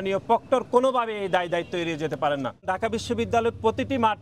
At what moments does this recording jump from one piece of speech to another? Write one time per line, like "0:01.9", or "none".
0:02.7